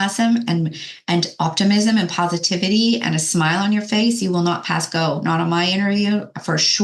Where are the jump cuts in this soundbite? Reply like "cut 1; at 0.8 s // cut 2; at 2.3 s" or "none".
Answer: none